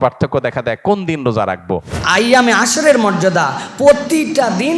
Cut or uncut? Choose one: cut